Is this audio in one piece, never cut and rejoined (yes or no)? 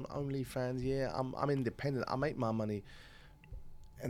yes